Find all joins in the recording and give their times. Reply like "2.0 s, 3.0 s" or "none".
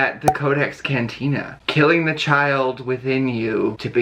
none